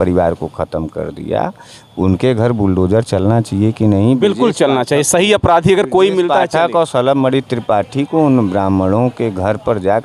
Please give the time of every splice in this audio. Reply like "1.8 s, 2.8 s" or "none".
none